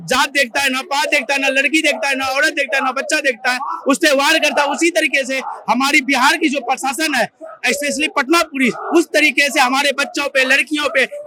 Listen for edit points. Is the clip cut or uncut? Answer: uncut